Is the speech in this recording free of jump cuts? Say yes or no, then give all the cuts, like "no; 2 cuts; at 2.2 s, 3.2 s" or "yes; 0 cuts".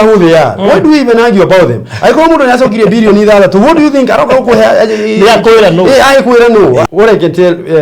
no; 1 cut; at 6.9 s